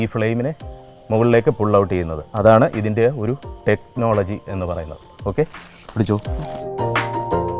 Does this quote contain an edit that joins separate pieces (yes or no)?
yes